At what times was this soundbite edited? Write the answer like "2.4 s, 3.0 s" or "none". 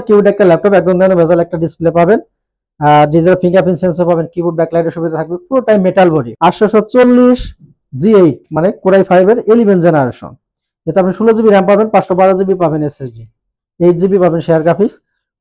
6.3 s